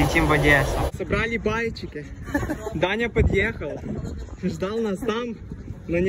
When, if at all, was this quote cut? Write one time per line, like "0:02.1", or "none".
0:01.0